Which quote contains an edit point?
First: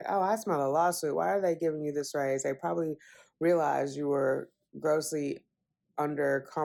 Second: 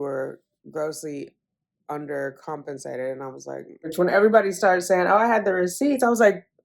second; 1 cut; at 3.9 s

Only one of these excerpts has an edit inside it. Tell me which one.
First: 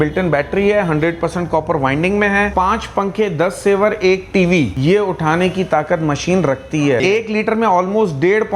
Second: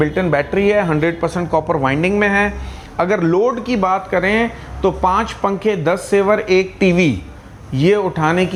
first; 3 cuts; at 2.5 s, 4.7 s, 7.0 s

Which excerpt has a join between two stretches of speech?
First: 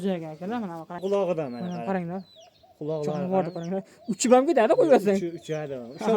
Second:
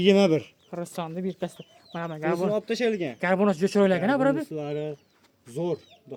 first; 1 cut; at 1.0 s

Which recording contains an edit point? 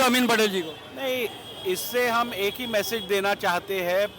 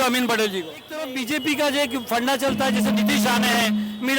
second; 1 cut; at 1.1 s

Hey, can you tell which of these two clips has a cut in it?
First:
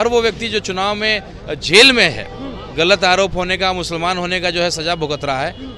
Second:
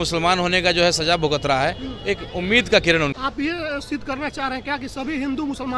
second; 1 cut; at 3.1 s

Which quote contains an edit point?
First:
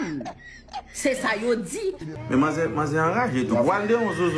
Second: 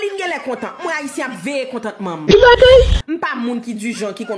first; 1 cut; at 2.1 s

